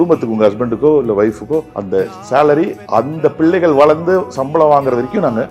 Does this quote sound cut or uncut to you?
uncut